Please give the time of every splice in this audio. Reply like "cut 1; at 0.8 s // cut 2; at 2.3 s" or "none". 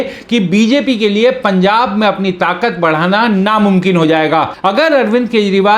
cut 1; at 4.5 s